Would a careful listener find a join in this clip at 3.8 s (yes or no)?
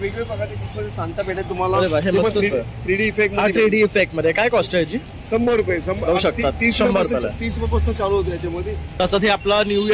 no